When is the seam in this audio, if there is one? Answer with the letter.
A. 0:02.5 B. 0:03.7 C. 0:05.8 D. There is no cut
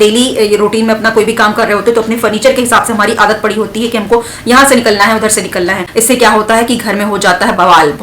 C